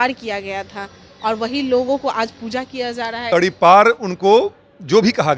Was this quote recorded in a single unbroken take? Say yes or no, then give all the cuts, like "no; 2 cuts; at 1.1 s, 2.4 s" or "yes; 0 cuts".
no; 1 cut; at 3.2 s